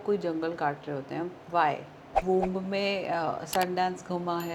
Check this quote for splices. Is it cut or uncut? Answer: cut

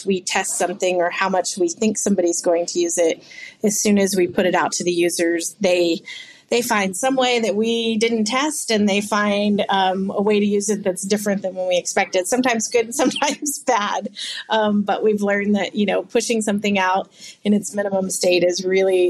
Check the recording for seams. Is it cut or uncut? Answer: uncut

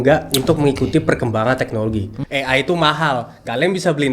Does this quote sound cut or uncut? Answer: cut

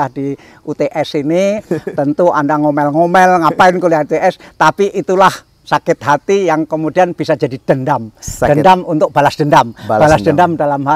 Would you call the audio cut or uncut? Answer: uncut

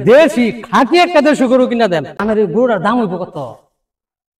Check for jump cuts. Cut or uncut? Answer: cut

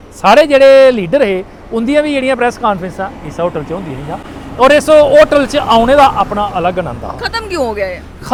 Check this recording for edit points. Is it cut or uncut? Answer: uncut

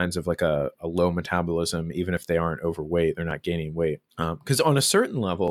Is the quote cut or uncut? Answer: cut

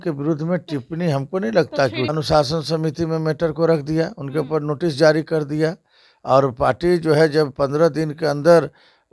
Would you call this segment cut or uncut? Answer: cut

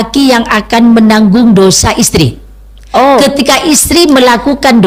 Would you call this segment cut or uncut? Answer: uncut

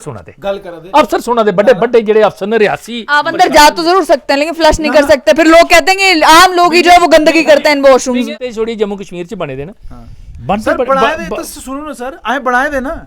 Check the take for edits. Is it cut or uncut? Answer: cut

